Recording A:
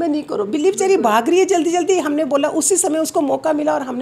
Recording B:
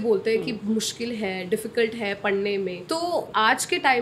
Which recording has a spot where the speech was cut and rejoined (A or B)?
B